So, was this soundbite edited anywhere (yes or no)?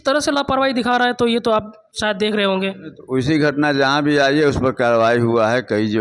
no